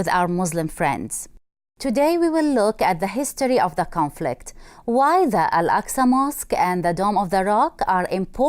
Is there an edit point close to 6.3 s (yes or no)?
no